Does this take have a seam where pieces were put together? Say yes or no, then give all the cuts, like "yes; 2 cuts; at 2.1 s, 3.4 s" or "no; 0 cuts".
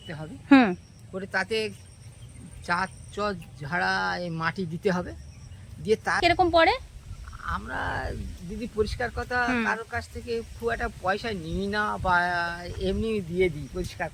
yes; 1 cut; at 6.2 s